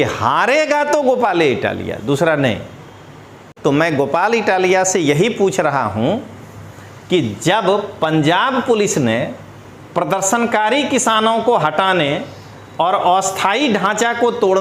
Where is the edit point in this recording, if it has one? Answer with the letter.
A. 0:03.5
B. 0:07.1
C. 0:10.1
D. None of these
A